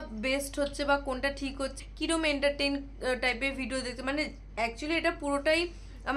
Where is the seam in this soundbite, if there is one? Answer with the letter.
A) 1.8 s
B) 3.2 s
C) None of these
A